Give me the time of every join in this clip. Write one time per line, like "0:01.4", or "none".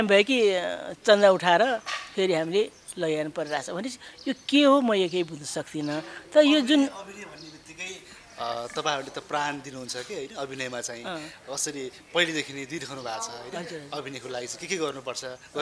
none